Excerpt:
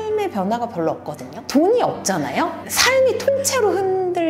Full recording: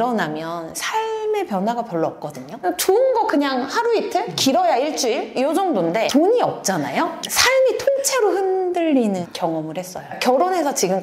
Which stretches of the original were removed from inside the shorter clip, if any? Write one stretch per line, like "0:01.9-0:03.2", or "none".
0:02.6-0:06.1